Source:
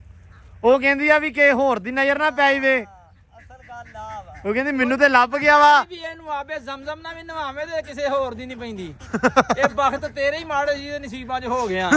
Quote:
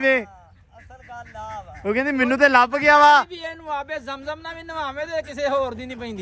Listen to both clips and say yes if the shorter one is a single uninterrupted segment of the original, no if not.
yes